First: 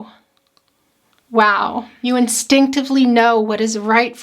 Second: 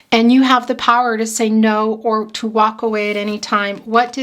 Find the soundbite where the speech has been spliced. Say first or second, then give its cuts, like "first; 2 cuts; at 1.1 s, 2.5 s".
first; 1 cut; at 1.9 s